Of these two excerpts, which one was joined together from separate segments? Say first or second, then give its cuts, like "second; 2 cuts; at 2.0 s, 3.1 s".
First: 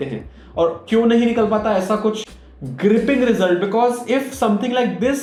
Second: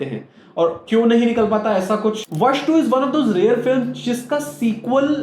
second; 1 cut; at 2.3 s